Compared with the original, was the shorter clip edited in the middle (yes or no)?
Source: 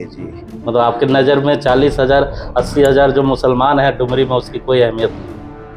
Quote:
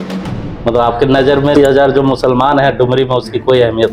yes